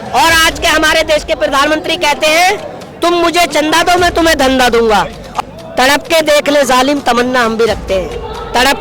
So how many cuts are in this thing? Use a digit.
1